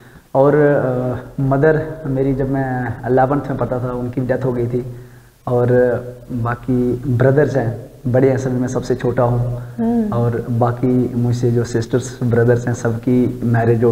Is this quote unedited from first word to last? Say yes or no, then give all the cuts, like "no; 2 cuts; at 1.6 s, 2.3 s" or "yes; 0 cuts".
yes; 0 cuts